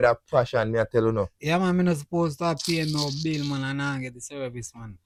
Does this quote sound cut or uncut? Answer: uncut